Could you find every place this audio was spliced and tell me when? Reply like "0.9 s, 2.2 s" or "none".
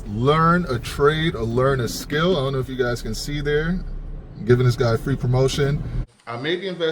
6.0 s